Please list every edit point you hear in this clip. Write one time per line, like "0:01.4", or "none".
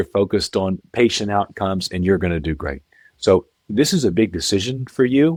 none